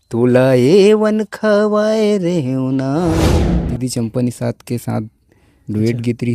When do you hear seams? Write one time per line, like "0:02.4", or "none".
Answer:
0:03.4